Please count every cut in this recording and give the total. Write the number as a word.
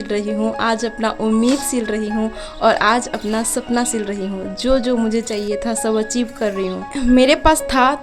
one